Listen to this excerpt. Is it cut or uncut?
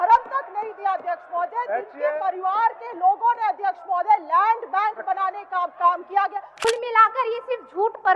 cut